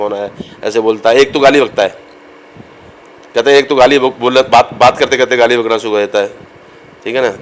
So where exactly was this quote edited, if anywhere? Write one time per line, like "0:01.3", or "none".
none